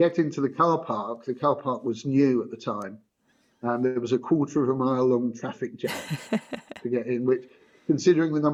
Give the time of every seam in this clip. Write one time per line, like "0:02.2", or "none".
none

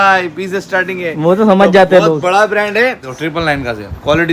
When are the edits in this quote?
0:03.0

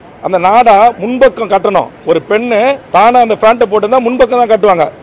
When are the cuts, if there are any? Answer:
0:02.8

